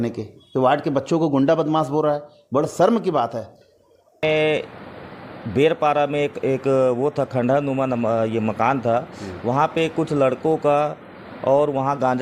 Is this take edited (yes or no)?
yes